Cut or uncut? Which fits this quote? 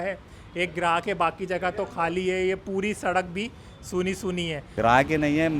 cut